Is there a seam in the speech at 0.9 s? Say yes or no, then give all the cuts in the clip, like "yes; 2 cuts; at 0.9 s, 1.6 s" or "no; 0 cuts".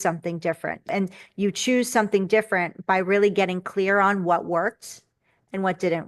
yes; 1 cut; at 0.9 s